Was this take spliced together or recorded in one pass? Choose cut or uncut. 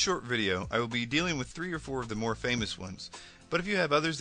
cut